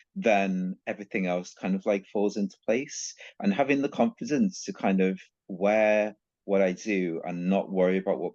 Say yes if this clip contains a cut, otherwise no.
no